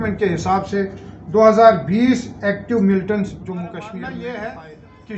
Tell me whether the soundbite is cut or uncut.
cut